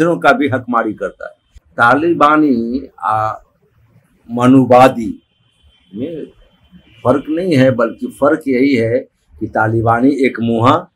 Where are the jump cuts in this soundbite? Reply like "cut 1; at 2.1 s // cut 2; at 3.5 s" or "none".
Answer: cut 1; at 1.6 s